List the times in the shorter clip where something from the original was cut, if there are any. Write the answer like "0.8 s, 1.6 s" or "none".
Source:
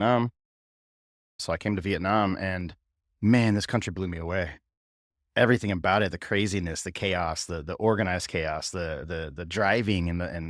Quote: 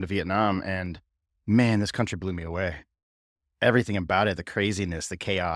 none